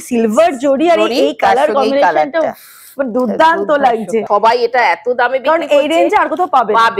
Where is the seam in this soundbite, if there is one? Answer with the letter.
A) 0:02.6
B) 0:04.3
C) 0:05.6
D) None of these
B